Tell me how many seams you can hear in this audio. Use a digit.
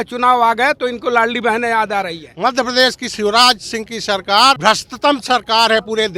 2